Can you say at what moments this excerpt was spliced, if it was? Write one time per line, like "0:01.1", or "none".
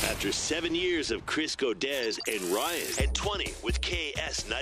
none